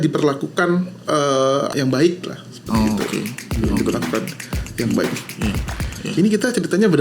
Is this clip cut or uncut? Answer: cut